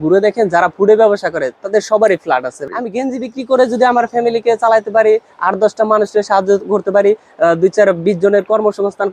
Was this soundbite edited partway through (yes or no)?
yes